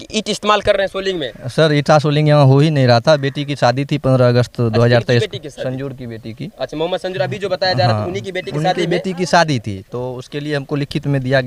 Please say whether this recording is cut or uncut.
uncut